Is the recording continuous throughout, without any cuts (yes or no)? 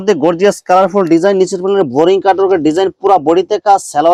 yes